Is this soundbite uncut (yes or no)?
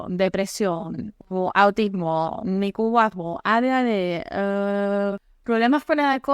no